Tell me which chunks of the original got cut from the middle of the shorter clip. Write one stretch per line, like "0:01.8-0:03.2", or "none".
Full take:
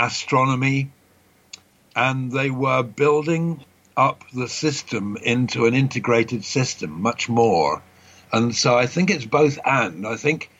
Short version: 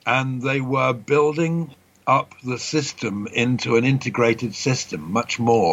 none